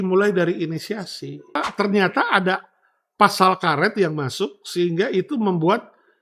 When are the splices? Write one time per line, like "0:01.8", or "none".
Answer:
0:01.6